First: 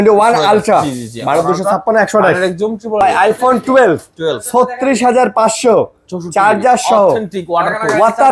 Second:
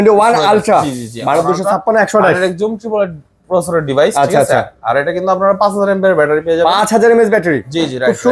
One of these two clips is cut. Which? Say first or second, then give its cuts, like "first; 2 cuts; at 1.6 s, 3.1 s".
first; 1 cut; at 3.0 s